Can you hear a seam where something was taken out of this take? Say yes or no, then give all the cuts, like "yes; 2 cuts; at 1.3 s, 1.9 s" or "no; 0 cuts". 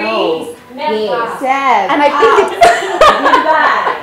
no; 0 cuts